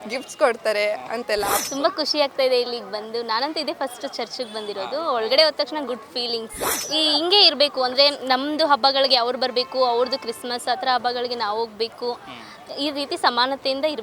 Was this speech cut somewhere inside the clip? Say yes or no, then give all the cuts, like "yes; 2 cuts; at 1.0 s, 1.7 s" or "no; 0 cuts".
yes; 2 cuts; at 1.5 s, 6.8 s